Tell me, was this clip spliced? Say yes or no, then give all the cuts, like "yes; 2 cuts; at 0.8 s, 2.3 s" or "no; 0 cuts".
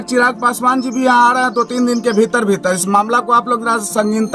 no; 0 cuts